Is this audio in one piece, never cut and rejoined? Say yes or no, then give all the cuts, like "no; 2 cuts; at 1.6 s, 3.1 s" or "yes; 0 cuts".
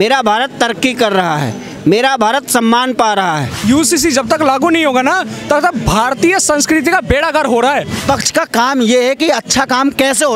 no; 2 cuts; at 3.6 s, 8.0 s